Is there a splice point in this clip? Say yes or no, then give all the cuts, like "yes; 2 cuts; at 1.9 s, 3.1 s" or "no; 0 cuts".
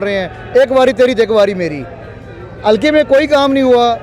no; 0 cuts